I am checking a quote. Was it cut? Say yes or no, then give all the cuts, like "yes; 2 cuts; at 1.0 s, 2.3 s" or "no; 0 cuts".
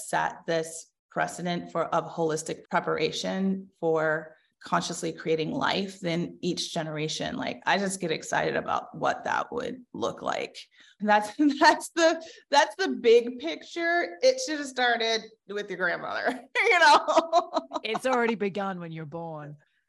yes; 3 cuts; at 2.5 s, 4.5 s, 10.9 s